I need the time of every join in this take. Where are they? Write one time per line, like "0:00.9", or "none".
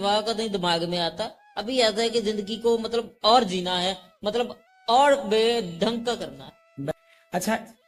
0:06.9